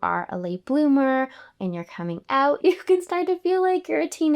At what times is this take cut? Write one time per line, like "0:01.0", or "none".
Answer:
0:02.6